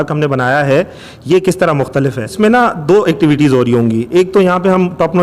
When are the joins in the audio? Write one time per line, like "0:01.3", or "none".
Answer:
0:02.3